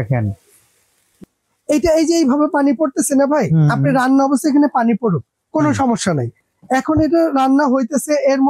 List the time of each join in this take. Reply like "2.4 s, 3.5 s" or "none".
none